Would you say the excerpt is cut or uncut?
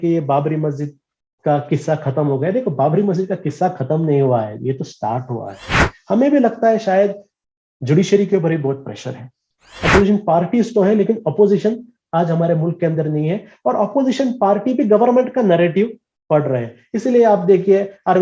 cut